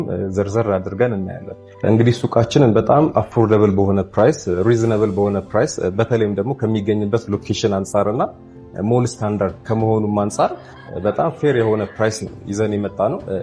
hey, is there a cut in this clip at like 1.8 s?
yes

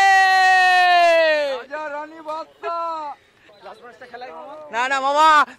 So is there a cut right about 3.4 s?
yes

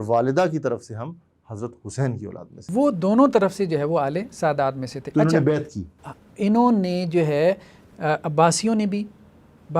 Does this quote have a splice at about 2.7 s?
yes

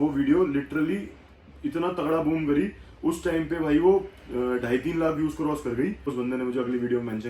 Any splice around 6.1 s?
yes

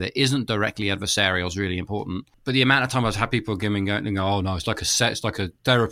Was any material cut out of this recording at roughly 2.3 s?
yes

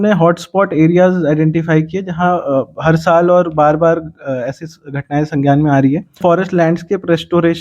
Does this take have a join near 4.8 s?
no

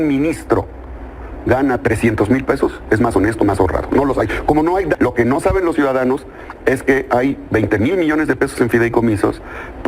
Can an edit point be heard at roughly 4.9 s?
yes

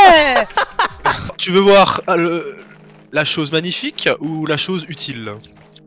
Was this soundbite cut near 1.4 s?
yes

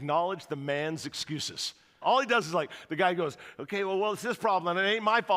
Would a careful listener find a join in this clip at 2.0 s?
yes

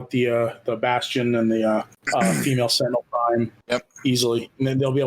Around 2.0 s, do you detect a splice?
yes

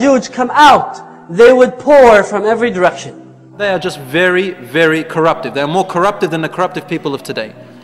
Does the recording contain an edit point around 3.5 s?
yes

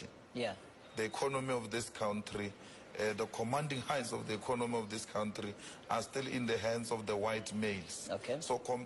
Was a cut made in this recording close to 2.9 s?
no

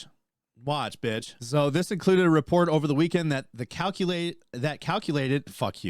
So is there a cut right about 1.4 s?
yes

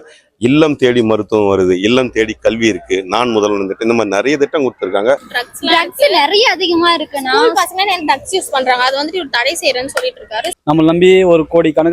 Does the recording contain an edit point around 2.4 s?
no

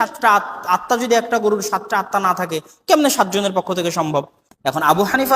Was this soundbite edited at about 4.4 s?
yes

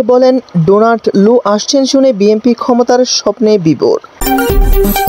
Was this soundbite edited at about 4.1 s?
yes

